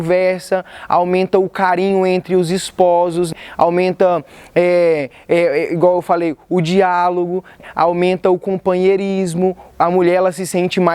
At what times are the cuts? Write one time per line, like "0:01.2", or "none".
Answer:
0:03.3
0:07.6

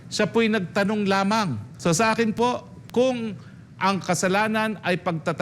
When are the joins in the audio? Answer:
0:01.6

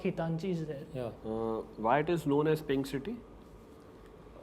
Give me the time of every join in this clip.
0:01.2

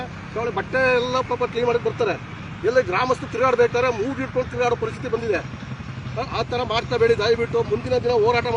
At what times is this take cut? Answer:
none

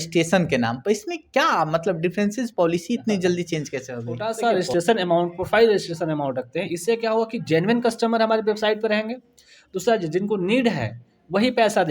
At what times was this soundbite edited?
0:04.3

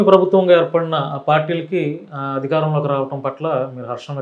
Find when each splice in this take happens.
none

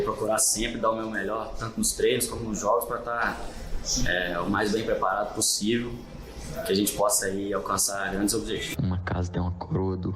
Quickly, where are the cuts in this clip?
0:08.7

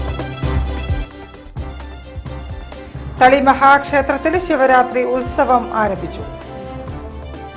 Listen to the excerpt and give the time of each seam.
0:01.0

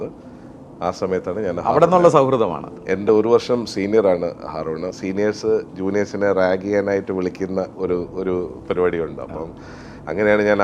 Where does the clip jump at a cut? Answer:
0:02.7
0:04.9

